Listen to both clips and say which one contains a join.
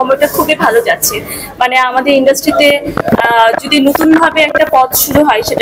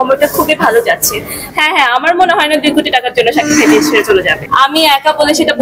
second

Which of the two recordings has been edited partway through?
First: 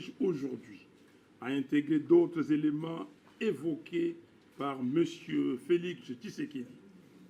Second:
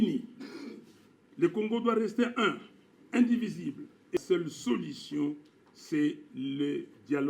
second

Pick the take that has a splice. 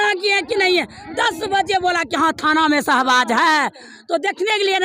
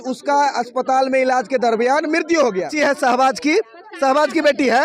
second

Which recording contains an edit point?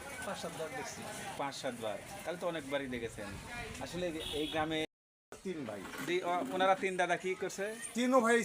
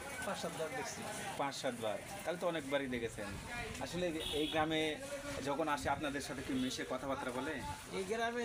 first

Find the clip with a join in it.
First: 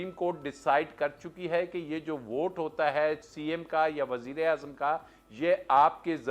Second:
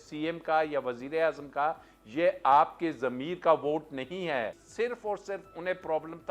second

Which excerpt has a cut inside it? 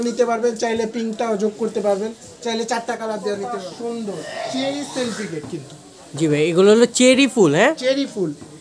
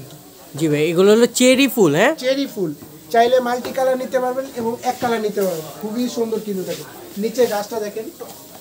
first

